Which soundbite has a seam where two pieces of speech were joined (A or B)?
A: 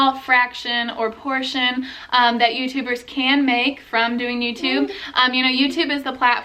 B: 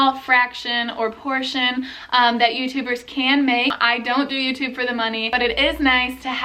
B